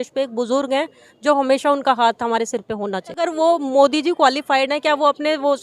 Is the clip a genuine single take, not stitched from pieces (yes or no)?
no